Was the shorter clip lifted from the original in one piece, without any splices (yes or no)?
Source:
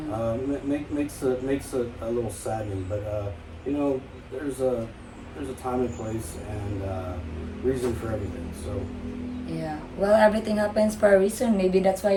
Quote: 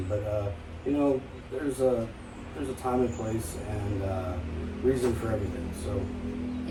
yes